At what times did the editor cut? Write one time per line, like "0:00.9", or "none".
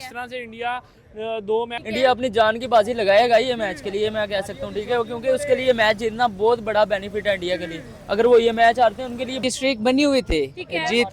0:01.8
0:09.4